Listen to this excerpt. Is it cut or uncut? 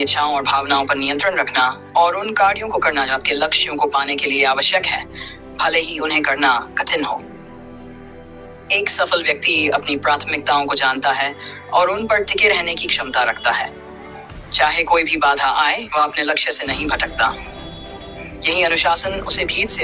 uncut